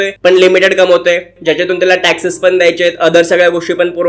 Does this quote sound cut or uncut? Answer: uncut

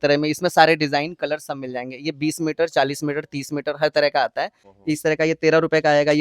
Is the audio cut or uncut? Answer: cut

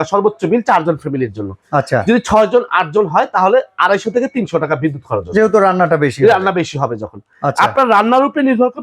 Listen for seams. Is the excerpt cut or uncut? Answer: uncut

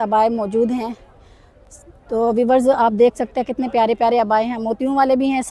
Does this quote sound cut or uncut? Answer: uncut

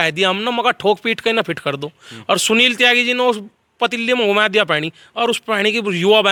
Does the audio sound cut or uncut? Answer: uncut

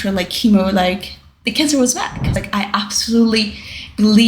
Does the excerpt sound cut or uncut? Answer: cut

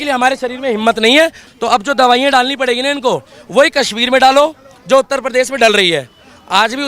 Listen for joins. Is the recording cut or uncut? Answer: cut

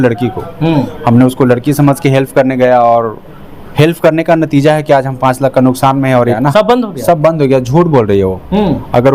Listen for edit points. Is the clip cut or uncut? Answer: cut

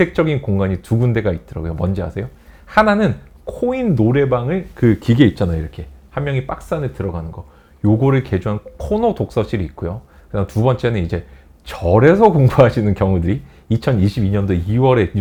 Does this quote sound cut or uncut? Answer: uncut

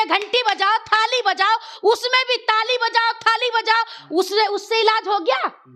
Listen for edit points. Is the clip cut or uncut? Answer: uncut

